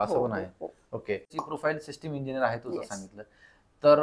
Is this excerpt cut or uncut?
cut